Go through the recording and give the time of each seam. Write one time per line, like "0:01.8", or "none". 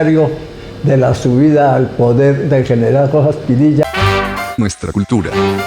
0:03.8